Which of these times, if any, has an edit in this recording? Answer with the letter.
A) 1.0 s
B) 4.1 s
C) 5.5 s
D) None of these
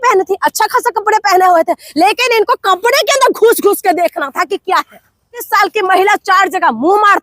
C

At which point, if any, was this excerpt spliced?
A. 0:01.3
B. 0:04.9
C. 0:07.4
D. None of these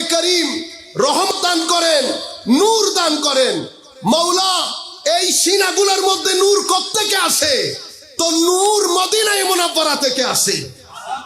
A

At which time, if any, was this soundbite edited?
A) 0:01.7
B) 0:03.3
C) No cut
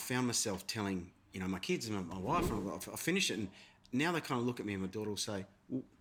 C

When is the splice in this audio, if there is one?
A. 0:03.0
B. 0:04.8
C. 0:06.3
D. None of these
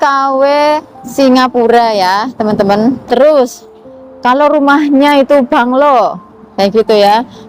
A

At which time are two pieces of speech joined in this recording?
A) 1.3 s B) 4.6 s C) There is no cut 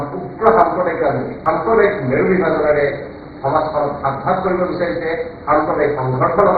A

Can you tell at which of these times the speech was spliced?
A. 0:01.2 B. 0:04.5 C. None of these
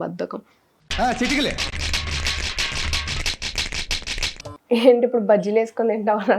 B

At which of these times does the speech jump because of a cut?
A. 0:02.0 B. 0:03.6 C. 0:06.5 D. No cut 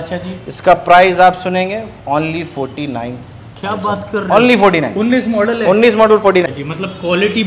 C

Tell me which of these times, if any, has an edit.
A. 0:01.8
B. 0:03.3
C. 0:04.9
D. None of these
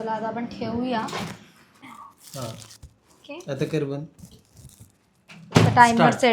A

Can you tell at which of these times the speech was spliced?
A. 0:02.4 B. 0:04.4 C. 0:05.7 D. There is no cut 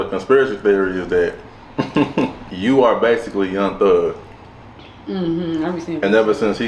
A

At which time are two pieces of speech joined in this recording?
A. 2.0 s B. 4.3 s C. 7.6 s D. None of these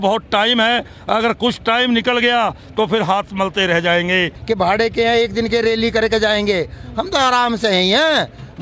B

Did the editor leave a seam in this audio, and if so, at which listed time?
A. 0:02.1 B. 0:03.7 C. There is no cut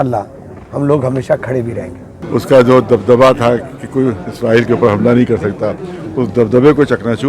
A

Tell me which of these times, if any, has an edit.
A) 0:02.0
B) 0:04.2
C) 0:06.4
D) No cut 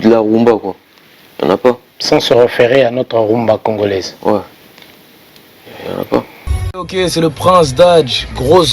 C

